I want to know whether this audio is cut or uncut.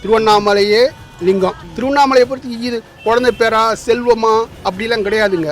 cut